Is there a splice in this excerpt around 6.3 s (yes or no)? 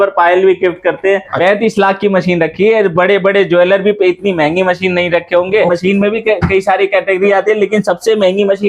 no